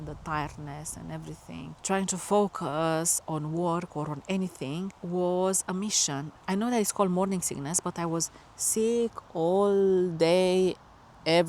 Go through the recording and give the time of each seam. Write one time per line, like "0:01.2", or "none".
0:01.8
0:05.0
0:06.3